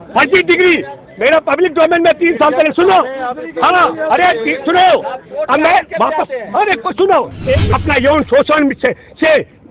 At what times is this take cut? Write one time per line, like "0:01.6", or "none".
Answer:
0:07.8

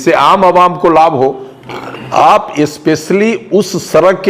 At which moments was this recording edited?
0:01.5

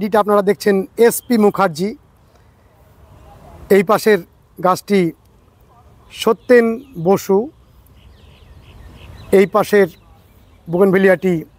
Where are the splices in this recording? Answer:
none

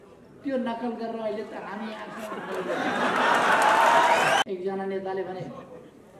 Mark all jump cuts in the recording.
0:04.4

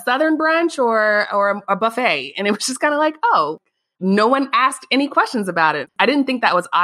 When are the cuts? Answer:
0:05.9

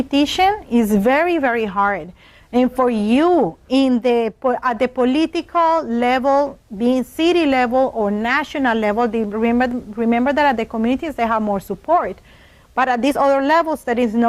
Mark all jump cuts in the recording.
0:07.3

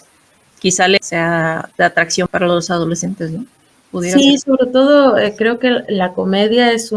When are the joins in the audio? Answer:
0:01.0
0:02.3

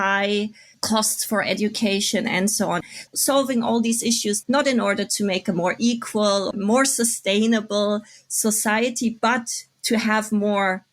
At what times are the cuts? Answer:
0:02.8
0:06.5

